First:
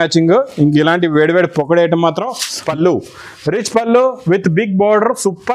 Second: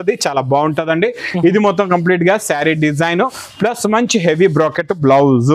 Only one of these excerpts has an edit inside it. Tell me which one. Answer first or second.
first